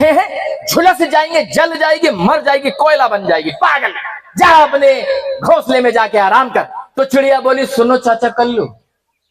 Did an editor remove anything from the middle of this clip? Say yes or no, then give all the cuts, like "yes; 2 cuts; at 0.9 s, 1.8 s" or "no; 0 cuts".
yes; 1 cut; at 6.8 s